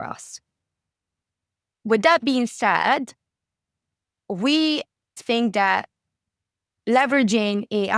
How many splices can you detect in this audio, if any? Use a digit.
1